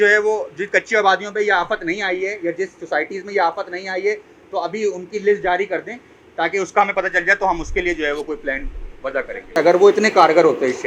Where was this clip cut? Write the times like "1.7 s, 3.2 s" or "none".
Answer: 9.6 s